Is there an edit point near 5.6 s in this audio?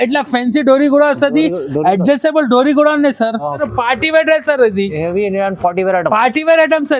no; 1 cut; at 3.6 s

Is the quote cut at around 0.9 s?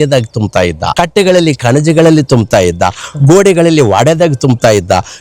yes; 1 cut; at 0.9 s

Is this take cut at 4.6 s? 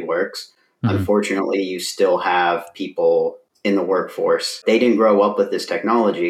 yes; 2 cuts; at 3.5 s, 4.6 s

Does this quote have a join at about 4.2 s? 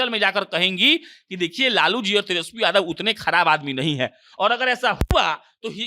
no; 0 cuts

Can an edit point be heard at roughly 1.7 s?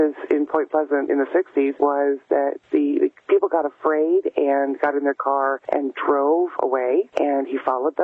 yes; 4 cuts; at 1.7 s, 2.6 s, 5.6 s, 7.1 s

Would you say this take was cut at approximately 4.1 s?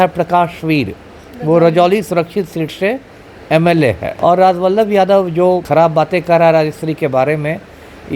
yes; 2 cuts; at 4.1 s, 5.6 s

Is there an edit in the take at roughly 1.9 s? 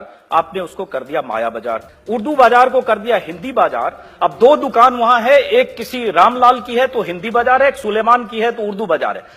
yes; 1 cut; at 1.9 s

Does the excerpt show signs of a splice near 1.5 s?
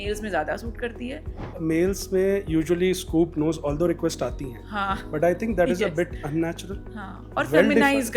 yes; 1 cut; at 1.5 s

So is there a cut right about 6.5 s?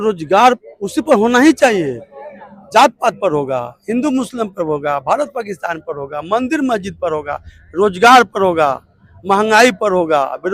no; 0 cuts

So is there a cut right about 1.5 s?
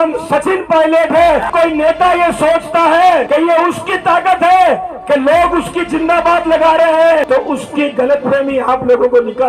yes; 3 cuts; at 1.5 s, 3.3 s, 7.3 s

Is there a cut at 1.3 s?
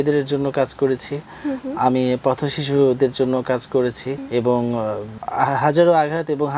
no; 2 cuts; at 4.1 s, 5.1 s

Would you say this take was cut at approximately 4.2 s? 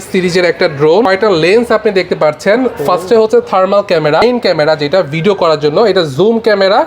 yes; 2 cuts; at 1.1 s, 4.2 s

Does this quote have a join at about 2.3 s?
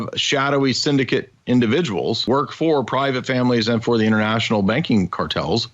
yes; 1 cut; at 2.3 s

